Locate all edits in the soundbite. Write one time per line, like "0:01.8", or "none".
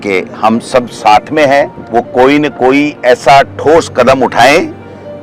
0:01.8